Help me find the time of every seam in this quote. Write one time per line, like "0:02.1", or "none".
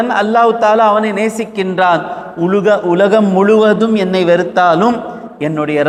none